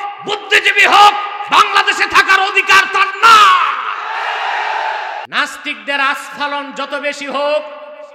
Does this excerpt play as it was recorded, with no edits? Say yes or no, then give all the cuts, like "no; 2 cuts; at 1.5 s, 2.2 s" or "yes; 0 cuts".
no; 1 cut; at 5.3 s